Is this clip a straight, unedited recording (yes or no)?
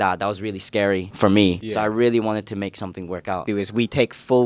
no